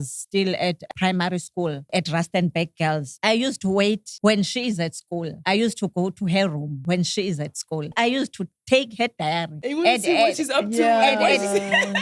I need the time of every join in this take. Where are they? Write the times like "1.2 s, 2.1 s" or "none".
0.9 s, 1.9 s, 3.1 s, 4.1 s, 5.3 s, 6.7 s, 7.9 s, 9.5 s